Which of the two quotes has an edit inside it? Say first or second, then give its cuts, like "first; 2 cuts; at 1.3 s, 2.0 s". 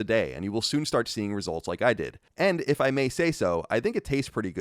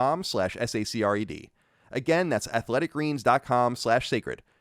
first; 1 cut; at 2.2 s